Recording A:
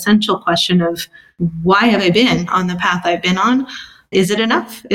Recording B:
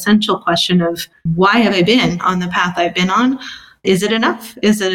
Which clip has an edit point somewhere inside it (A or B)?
B